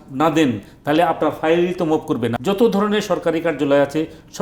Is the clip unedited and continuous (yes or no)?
no